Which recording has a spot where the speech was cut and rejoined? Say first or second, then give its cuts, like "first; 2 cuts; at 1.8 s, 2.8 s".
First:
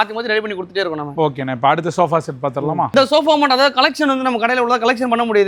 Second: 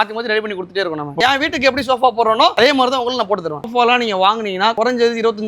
second; 3 cuts; at 1.2 s, 3.7 s, 4.7 s